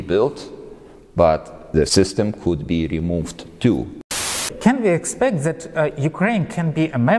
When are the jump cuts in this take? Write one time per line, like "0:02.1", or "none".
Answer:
0:01.9
0:04.1